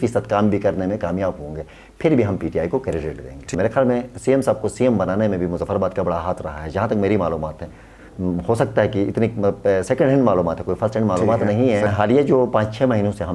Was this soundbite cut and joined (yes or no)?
yes